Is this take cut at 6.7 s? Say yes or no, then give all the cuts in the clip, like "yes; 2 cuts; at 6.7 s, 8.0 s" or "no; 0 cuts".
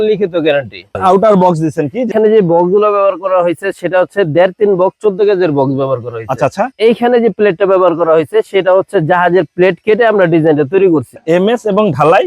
yes; 4 cuts; at 1.0 s, 2.1 s, 6.7 s, 11.1 s